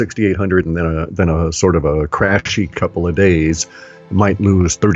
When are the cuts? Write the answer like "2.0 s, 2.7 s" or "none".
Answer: none